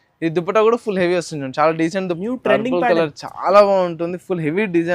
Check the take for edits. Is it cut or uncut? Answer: cut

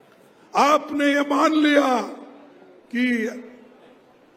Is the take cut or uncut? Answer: uncut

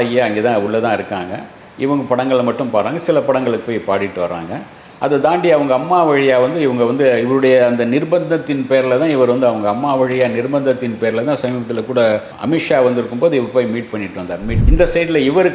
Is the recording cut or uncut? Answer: cut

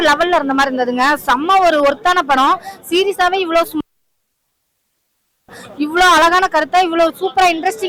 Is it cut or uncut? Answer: uncut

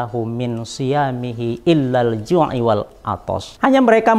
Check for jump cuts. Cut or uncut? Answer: cut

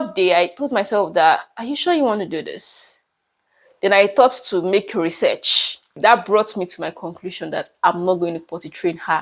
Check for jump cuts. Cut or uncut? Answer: uncut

